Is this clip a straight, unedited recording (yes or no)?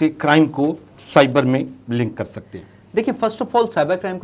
yes